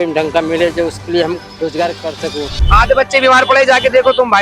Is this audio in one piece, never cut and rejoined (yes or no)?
no